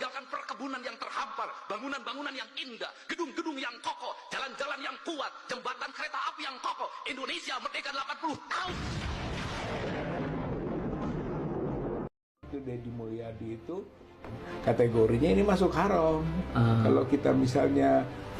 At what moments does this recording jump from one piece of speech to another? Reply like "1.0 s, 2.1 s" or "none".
12.1 s